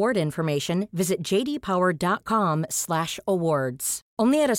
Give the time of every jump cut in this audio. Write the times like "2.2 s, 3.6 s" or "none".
none